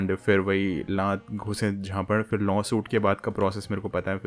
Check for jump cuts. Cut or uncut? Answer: uncut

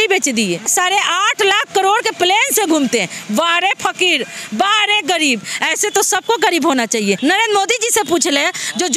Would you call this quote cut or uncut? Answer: cut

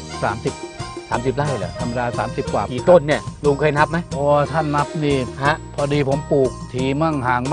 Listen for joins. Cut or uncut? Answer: cut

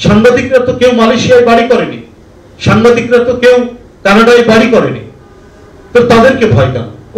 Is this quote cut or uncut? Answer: uncut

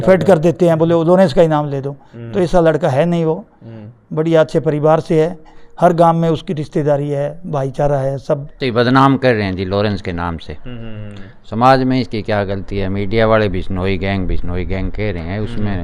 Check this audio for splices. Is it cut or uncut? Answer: cut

